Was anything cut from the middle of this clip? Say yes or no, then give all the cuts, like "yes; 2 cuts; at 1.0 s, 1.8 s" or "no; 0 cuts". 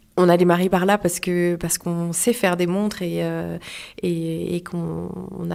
no; 0 cuts